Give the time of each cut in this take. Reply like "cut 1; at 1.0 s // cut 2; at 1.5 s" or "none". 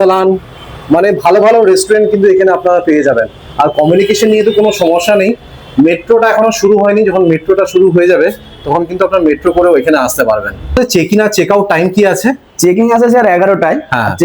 cut 1; at 10.8 s